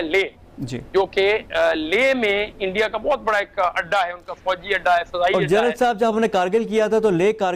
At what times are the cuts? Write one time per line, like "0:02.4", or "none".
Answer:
none

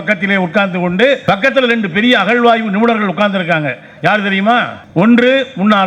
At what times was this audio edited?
0:01.2
0:04.8

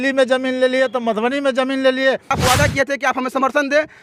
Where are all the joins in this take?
0:02.4

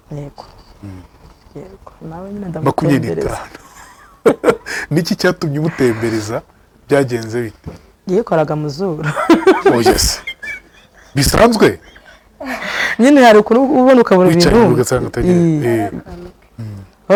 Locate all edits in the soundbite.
none

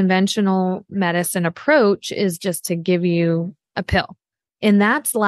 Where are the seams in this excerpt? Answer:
0:04.1

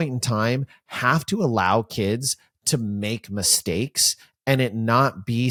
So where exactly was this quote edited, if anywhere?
none

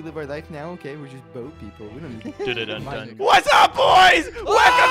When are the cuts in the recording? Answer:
0:03.1

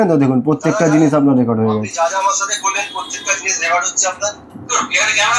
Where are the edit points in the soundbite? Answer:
none

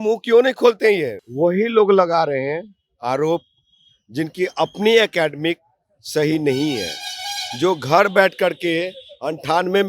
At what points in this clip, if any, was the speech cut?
0:01.2

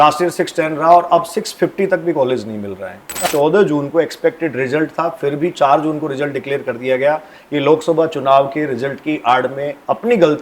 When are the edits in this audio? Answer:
0:03.2

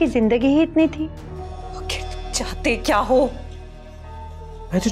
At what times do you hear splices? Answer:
0:01.4

